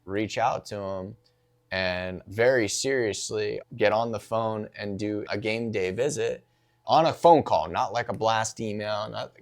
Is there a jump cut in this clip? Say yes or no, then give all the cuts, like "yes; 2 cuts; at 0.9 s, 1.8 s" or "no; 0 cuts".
yes; 4 cuts; at 2.2 s, 3.6 s, 5.2 s, 6.8 s